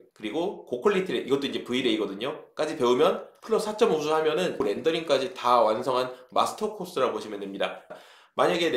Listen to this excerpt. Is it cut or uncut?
cut